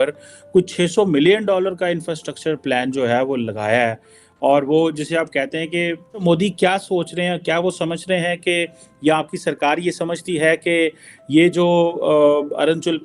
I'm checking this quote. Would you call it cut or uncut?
cut